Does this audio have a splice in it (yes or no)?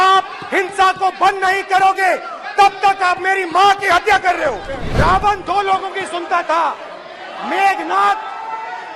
yes